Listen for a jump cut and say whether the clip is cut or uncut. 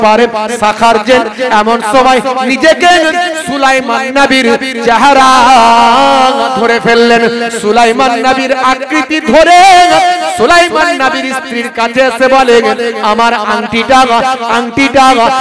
uncut